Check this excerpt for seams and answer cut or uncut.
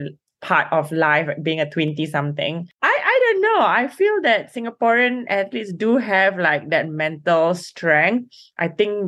cut